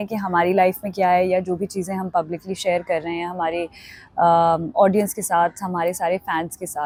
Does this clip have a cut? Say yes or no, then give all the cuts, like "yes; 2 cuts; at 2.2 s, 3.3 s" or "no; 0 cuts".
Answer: no; 0 cuts